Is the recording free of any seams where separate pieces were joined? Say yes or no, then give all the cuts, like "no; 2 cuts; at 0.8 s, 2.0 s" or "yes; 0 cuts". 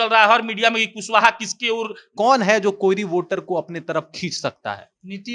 no; 1 cut; at 2.0 s